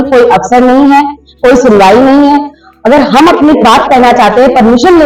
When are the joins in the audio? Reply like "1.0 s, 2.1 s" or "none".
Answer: none